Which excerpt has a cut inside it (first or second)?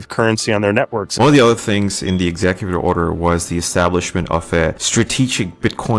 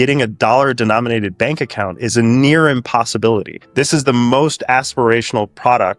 first